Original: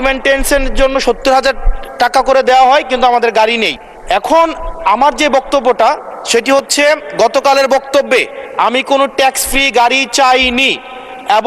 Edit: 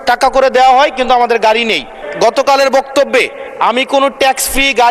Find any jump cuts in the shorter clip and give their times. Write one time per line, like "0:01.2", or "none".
0:02.1